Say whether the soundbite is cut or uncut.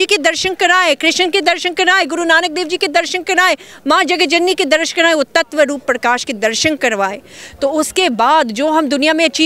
uncut